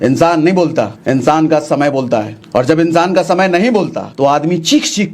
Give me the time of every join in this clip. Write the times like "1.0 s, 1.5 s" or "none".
1.0 s, 2.4 s, 4.0 s